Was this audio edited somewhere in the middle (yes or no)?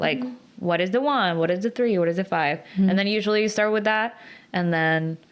no